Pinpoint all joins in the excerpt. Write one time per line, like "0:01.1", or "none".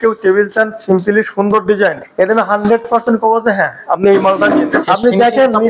0:02.0
0:04.8